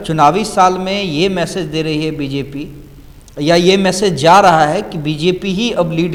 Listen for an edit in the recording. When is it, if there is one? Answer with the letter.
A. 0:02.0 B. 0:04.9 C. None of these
C